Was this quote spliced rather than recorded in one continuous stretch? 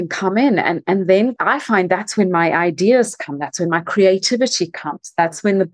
yes; 1 cut; at 1.4 s

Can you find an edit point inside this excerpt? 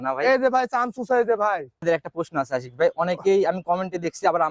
yes; 1 cut; at 1.8 s

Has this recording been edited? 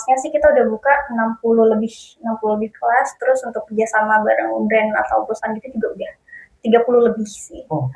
no; 0 cuts

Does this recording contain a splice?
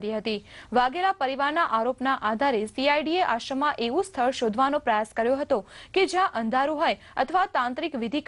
no; 0 cuts

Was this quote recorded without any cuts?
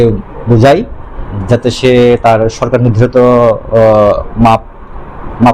yes; 0 cuts

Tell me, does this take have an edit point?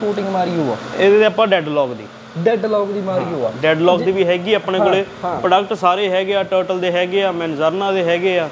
no; 0 cuts

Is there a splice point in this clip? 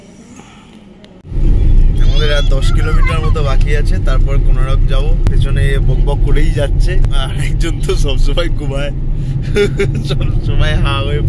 yes; 3 cuts; at 1.2 s, 5.3 s, 7.1 s

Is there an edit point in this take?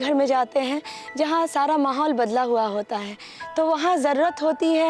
no; 0 cuts

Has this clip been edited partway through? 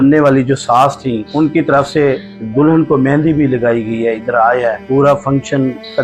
no; 0 cuts

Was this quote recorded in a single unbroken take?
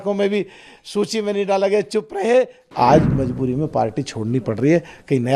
no; 1 cut; at 2.6 s

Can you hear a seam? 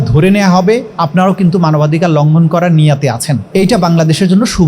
yes; 2 cuts; at 0.9 s, 3.3 s

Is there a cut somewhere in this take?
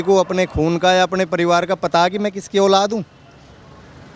no; 0 cuts

